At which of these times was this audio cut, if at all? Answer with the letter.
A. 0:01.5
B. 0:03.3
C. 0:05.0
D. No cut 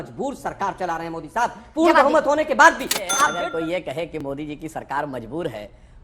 B